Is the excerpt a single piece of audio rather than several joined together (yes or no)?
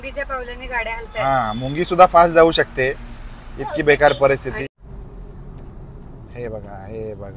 no